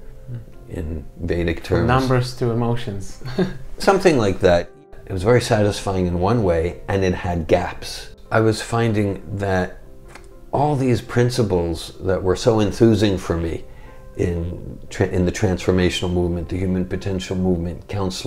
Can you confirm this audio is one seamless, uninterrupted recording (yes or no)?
no